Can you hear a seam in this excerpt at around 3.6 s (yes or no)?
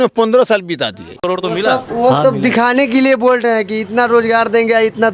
no